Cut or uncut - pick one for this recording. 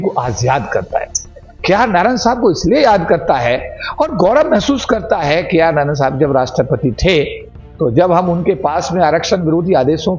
uncut